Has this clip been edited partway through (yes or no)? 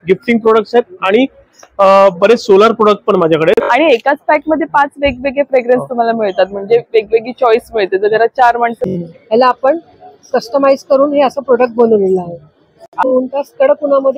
yes